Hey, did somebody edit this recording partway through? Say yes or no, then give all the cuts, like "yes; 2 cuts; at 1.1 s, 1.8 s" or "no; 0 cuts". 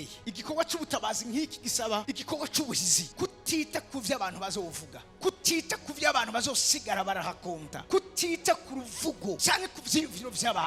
no; 0 cuts